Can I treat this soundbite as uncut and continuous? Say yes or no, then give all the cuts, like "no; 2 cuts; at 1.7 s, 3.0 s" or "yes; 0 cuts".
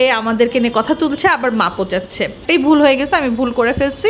no; 1 cut; at 2.4 s